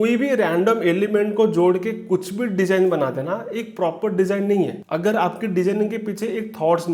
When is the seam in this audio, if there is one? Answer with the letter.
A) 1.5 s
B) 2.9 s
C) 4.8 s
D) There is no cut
D